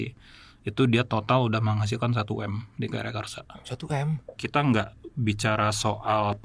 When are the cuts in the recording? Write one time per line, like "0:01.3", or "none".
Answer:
0:04.4

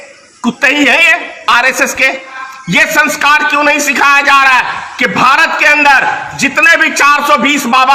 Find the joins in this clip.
0:02.3

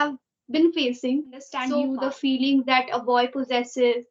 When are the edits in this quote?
0:01.5

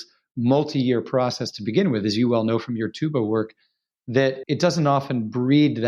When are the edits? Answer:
0:04.4

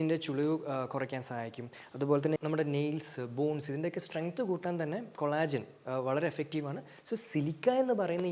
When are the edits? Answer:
none

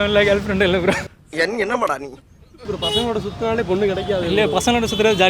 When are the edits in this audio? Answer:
none

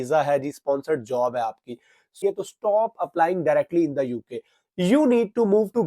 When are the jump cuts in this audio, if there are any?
0:02.1

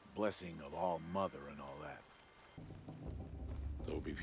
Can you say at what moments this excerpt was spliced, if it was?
0:02.6

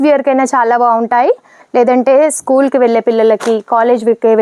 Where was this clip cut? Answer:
none

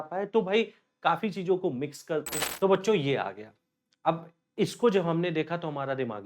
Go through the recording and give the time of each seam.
0:02.4

